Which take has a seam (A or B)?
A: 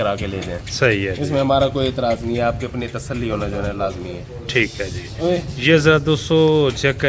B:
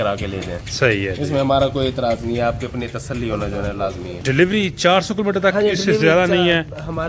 B